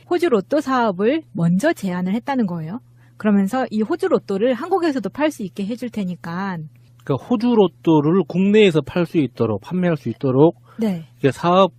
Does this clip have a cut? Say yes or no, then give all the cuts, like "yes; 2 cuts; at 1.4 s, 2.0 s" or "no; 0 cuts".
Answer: yes; 1 cut; at 7.2 s